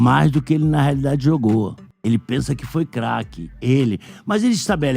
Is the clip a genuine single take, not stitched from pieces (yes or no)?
no